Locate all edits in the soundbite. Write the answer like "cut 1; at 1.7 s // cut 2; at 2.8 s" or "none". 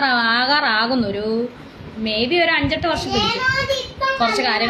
none